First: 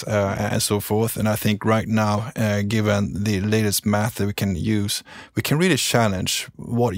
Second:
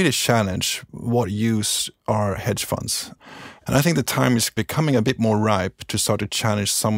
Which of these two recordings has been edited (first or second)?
second